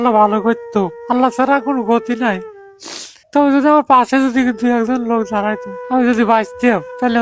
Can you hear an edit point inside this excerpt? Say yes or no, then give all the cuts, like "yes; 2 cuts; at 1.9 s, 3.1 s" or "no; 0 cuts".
yes; 1 cut; at 5.8 s